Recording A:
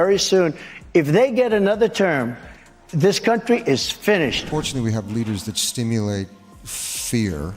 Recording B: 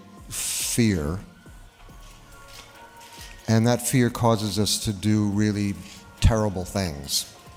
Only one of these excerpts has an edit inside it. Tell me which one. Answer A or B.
A